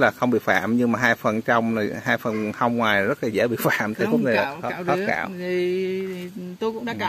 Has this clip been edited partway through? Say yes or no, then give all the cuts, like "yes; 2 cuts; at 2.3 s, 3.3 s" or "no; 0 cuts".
no; 0 cuts